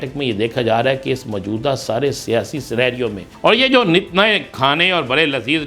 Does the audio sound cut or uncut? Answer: cut